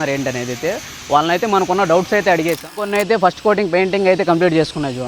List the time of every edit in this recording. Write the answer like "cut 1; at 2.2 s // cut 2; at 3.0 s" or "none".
cut 1; at 2.8 s